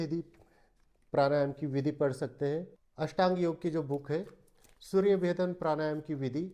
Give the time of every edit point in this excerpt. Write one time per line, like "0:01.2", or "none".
0:02.8